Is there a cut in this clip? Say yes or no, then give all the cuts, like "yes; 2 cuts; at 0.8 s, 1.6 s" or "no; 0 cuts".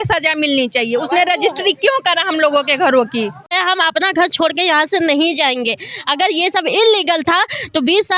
yes; 1 cut; at 3.6 s